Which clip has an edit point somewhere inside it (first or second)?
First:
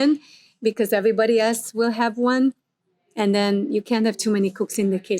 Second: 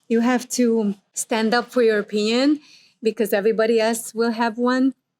second